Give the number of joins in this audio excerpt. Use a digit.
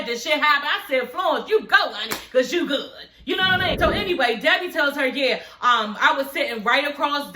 1